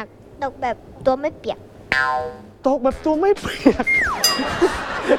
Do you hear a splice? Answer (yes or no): no